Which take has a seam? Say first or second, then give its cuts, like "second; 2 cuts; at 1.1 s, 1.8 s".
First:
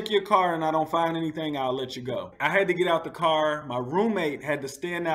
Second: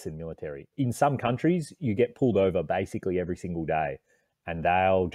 first; 1 cut; at 2.3 s